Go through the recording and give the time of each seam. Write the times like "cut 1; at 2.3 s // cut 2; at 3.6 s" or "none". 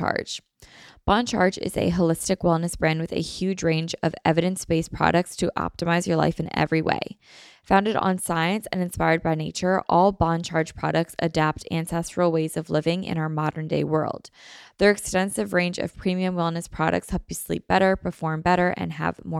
none